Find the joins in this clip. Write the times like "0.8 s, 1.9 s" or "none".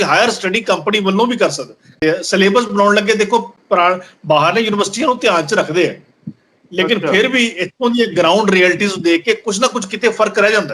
2.0 s